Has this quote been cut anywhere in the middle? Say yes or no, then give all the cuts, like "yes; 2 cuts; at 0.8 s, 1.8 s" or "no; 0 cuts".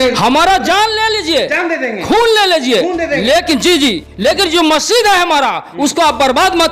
no; 0 cuts